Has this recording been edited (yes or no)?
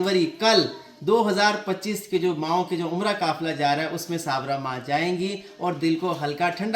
no